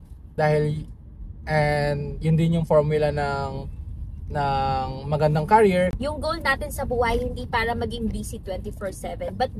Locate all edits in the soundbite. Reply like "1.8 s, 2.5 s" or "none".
5.9 s